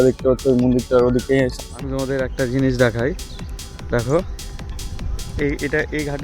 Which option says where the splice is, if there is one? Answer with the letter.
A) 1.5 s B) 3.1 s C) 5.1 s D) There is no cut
A